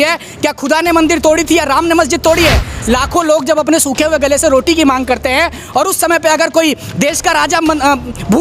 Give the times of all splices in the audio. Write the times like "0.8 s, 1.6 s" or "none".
2.7 s